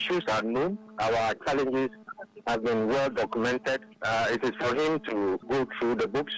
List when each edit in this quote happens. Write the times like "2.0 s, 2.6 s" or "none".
5.4 s